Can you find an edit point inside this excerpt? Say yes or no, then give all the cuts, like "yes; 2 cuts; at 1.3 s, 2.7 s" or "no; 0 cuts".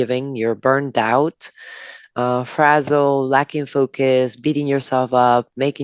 no; 0 cuts